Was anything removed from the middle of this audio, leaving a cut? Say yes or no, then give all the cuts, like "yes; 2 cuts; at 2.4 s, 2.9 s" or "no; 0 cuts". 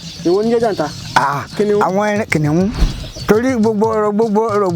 yes; 1 cut; at 2.9 s